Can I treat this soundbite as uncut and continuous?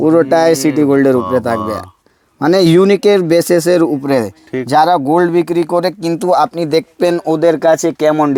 yes; 0 cuts

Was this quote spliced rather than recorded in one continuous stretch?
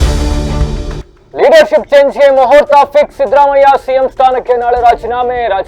no; 0 cuts

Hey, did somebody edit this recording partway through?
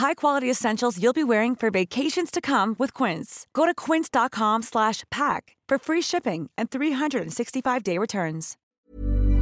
yes; 1 cut; at 8.5 s

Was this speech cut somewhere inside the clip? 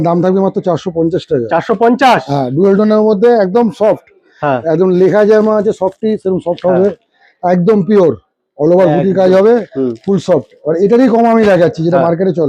no; 0 cuts

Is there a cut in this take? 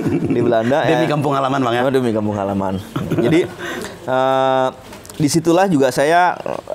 no; 0 cuts

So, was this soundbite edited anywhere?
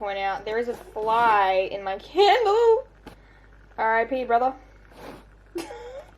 no; 0 cuts

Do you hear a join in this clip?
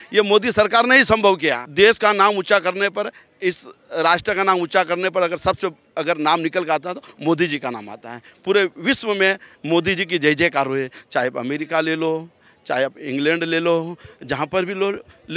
yes; 1 cut; at 1.6 s

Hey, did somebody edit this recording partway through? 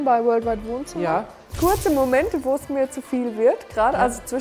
yes; 1 cut; at 1.4 s

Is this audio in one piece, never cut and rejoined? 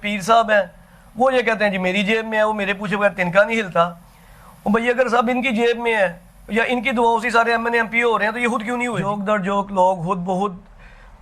no; 1 cut; at 9.0 s

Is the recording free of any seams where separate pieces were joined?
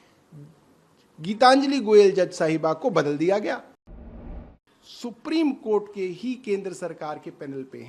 no; 1 cut; at 4.2 s

